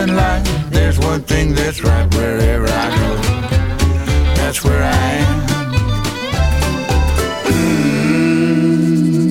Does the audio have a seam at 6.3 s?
no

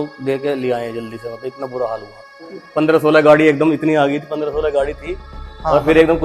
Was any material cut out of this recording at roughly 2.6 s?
yes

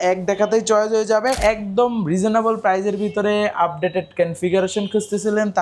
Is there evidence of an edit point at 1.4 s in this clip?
yes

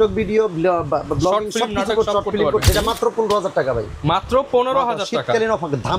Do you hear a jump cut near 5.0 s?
no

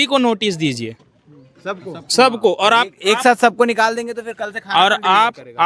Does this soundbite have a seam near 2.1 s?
no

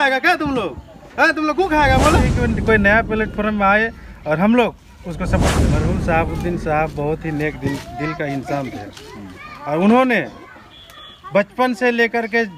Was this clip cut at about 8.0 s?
no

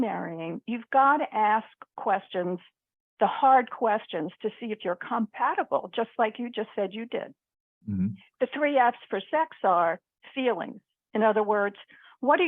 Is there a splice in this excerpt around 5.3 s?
no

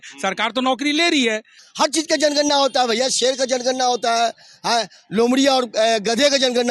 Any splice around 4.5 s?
no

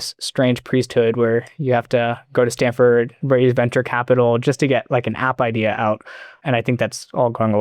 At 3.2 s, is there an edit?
yes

